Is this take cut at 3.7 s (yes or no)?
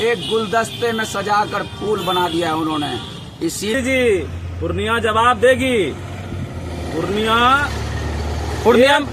yes